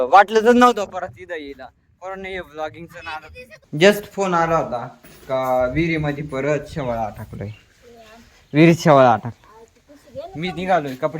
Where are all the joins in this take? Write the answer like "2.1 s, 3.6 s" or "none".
3.6 s